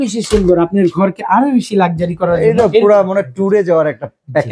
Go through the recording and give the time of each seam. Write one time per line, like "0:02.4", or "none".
none